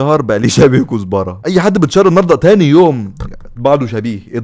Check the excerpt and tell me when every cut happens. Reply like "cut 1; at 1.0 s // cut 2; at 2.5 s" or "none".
none